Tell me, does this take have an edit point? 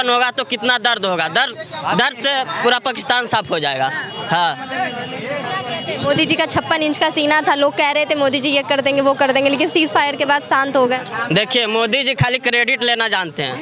no; 0 cuts

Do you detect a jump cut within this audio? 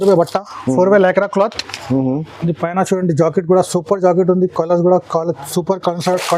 no; 0 cuts

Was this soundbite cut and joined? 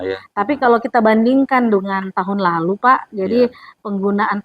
no; 0 cuts

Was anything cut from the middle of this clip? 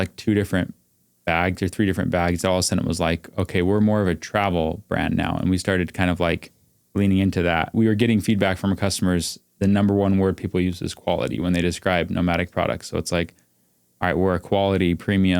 yes; 1 cut; at 7.7 s

